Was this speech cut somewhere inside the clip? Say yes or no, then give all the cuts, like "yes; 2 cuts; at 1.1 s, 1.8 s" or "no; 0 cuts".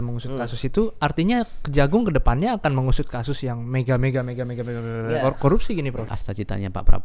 yes; 1 cut; at 6.1 s